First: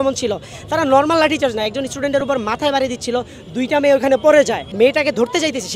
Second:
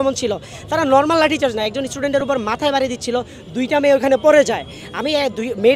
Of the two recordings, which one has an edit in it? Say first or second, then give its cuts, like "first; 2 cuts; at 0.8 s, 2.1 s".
first; 1 cut; at 4.7 s